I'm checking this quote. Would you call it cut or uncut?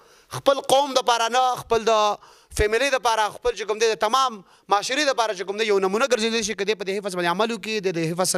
uncut